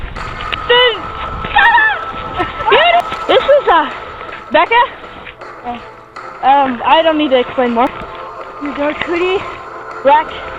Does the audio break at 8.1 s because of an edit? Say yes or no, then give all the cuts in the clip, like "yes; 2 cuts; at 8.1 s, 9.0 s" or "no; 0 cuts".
yes; 2 cuts; at 3.0 s, 8.1 s